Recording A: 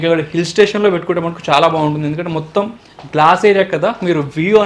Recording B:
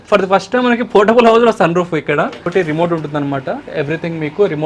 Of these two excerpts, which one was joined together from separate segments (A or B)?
B